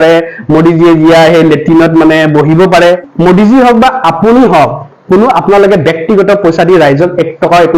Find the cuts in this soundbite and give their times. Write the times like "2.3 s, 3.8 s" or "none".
3.1 s